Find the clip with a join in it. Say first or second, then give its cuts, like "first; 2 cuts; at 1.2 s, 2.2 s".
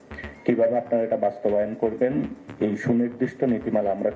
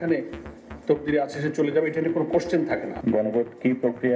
second; 1 cut; at 2.9 s